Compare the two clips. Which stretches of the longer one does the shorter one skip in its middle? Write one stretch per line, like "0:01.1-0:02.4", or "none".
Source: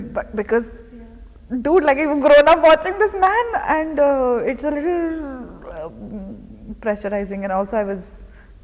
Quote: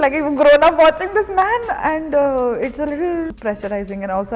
0:05.2-0:06.8